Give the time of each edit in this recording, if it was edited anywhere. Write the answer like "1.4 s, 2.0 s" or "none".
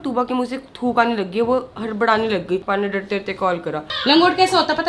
2.6 s, 3.8 s